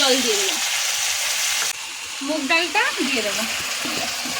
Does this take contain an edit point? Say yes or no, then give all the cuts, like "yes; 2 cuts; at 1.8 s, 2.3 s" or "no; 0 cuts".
yes; 1 cut; at 1.8 s